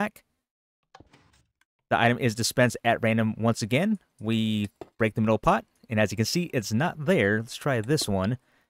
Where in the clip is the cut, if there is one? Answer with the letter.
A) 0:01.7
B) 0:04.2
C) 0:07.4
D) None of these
A